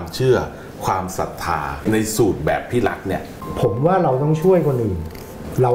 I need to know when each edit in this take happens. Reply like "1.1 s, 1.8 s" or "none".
1.8 s, 3.4 s